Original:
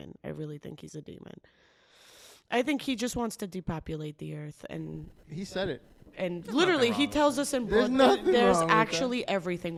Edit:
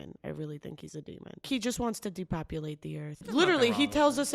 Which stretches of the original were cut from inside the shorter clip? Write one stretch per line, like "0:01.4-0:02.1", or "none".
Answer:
0:01.5-0:02.8
0:04.6-0:06.4